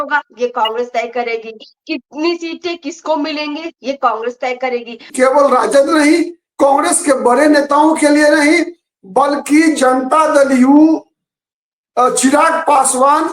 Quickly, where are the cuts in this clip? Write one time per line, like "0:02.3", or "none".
0:05.1